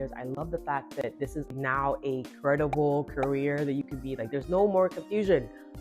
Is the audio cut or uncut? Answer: cut